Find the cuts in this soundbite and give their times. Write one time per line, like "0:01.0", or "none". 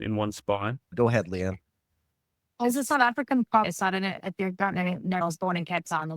0:00.9
0:03.7
0:05.2